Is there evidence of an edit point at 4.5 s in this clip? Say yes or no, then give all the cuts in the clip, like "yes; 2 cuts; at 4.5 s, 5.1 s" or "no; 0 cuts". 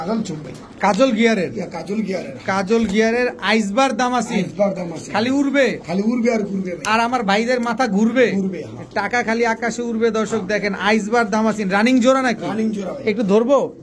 no; 0 cuts